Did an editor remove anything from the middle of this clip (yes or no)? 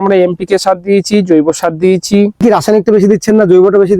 yes